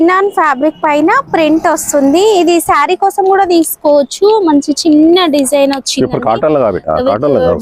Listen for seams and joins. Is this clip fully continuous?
yes; 0 cuts

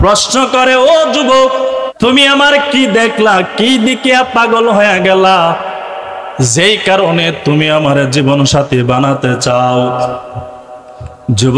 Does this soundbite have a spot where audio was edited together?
yes; 1 cut; at 1.9 s

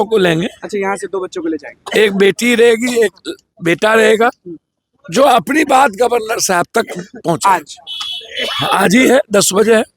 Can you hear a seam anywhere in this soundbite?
no; 0 cuts

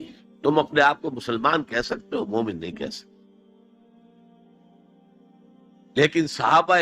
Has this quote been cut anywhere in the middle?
yes; 2 cuts; at 2.9 s, 5.7 s

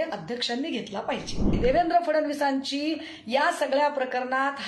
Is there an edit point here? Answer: yes; 1 cut; at 1.6 s

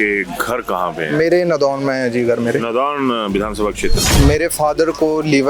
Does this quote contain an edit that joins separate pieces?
yes; 1 cut; at 4.0 s

